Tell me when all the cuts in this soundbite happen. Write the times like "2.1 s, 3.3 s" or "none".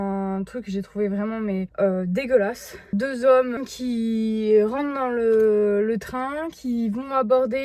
none